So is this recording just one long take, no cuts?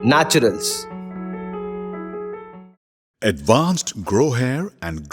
yes; 0 cuts

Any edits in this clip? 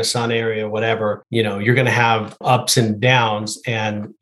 yes; 2 cuts; at 1.2 s, 2.4 s

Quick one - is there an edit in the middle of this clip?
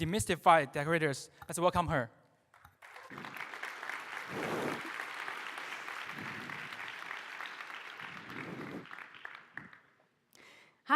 yes; 1 cut; at 4.6 s

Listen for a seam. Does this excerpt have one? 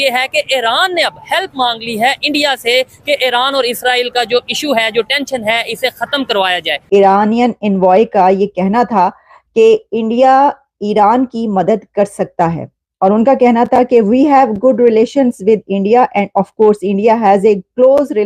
yes; 1 cut; at 6.8 s

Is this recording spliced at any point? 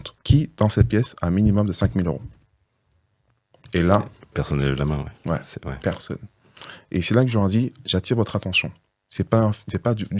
no; 0 cuts

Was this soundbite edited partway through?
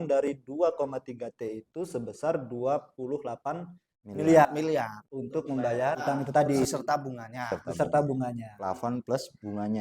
yes; 2 cuts; at 6.0 s, 6.7 s

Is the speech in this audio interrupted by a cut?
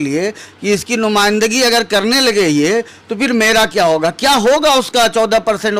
no; 0 cuts

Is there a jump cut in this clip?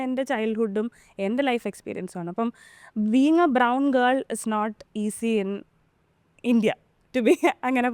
no; 0 cuts

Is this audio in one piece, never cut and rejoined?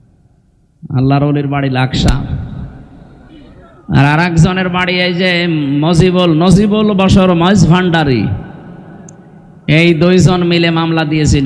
yes; 0 cuts

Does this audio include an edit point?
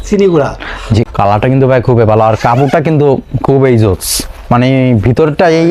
yes; 1 cut; at 1.1 s

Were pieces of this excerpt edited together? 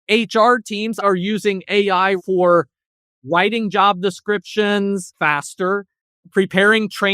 yes; 3 cuts; at 1.0 s, 2.2 s, 5.1 s

